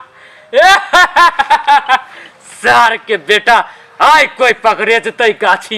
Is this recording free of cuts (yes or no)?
yes